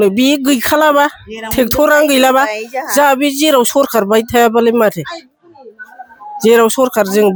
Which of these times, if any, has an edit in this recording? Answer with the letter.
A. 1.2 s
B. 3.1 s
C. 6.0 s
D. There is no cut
D